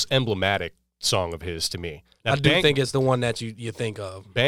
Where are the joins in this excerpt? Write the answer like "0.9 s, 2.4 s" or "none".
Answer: 2.0 s